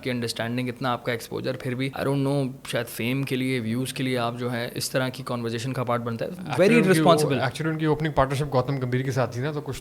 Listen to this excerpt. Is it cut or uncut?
cut